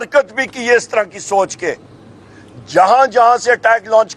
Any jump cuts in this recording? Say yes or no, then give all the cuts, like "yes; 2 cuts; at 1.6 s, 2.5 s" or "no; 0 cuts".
no; 0 cuts